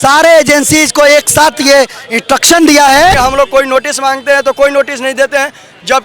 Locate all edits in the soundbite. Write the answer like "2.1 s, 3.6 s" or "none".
3.1 s